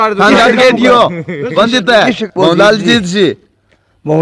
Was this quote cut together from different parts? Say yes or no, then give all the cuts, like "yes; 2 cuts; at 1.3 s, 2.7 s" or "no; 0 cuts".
yes; 1 cut; at 2.2 s